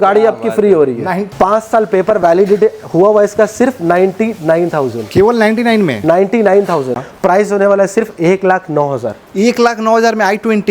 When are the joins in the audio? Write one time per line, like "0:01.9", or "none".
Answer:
0:01.2
0:07.1

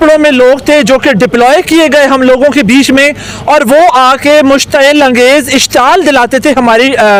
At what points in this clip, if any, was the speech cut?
none

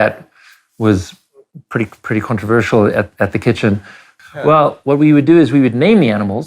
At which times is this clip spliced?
0:04.1

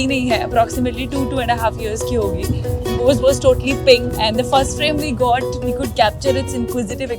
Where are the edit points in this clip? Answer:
0:04.1

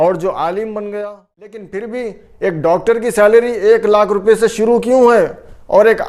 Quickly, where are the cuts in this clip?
0:01.9

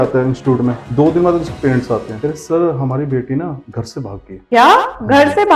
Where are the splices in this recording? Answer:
0:00.8
0:02.1
0:03.8

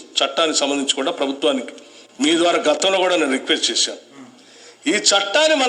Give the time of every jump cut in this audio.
none

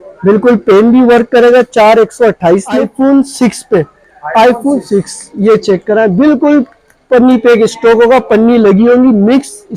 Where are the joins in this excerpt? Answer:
0:02.9

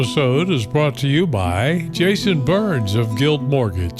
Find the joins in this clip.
none

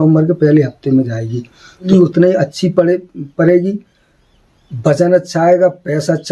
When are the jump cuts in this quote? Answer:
0:01.9

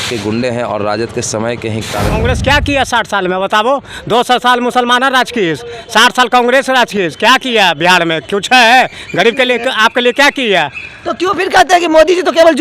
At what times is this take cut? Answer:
0:02.2

